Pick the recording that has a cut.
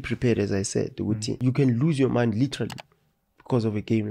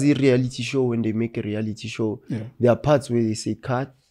first; 1 cut; at 1.4 s

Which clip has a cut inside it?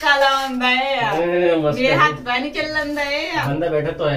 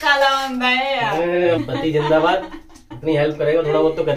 second; 1 cut; at 1.6 s

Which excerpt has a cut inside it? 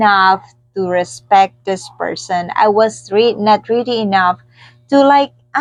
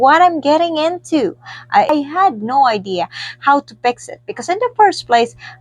second; 1 cut; at 1.9 s

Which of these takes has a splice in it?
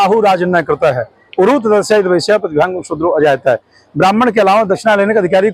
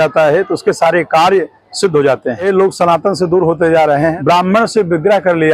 second; 2 cuts; at 2.4 s, 4.2 s

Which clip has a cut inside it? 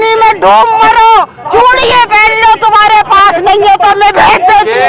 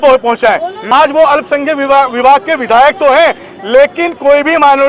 second; 1 cut; at 0.9 s

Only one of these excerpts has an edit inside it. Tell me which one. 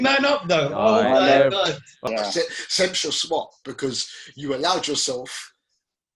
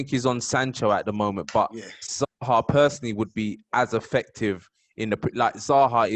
first; 1 cut; at 1.9 s

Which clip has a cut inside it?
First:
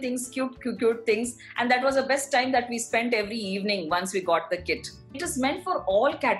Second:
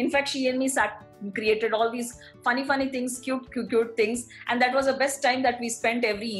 first; 1 cut; at 5.2 s

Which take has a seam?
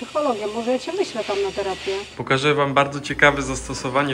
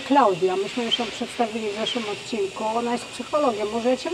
first; 1 cut; at 2.1 s

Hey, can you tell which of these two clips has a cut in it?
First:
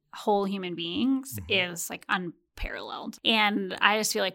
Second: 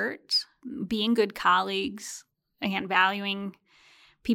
first; 1 cut; at 3.2 s

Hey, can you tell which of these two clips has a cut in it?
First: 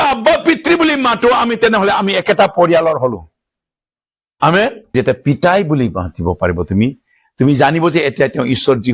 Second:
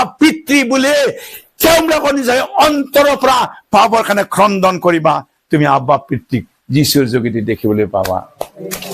first; 1 cut; at 4.8 s

